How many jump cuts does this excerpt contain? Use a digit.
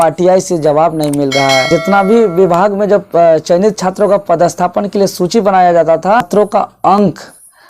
2